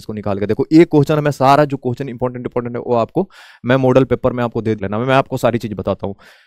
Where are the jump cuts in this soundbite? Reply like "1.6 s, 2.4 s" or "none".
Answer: 4.8 s

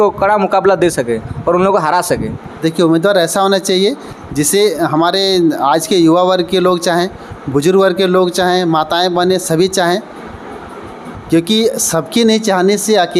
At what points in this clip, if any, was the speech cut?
none

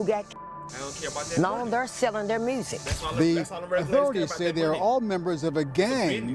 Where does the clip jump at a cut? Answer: 2.7 s

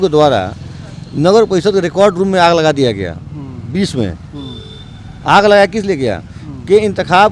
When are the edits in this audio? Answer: none

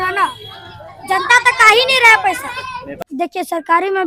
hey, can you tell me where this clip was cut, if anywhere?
3.0 s

